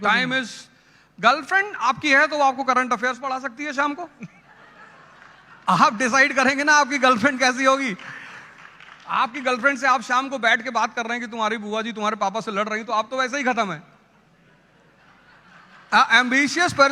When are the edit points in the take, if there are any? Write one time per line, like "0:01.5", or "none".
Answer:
none